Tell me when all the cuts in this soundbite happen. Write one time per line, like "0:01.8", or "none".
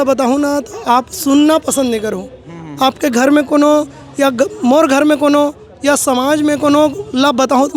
none